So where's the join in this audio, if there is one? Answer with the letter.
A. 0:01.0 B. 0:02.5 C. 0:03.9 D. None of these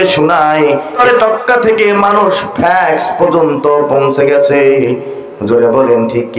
A